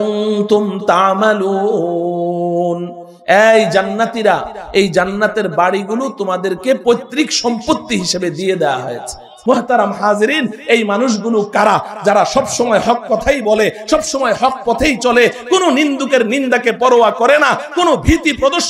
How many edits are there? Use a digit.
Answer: 1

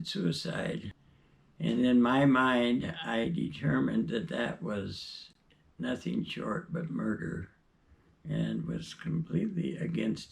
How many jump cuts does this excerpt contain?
1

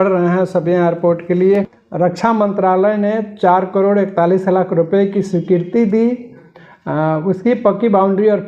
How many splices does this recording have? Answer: 1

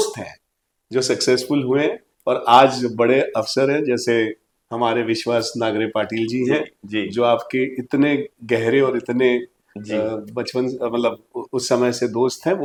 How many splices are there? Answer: 0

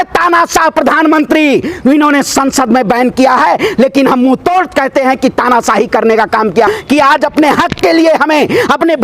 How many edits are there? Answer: 1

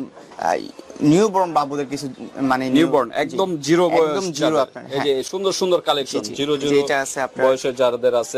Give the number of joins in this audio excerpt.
0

